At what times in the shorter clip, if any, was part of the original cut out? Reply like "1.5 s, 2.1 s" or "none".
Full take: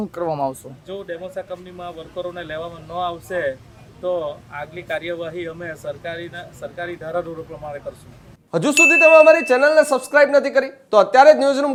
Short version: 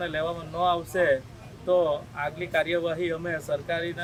none